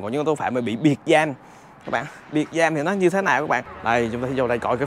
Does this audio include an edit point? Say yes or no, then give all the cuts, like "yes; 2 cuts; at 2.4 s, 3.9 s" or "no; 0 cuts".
yes; 1 cut; at 3.7 s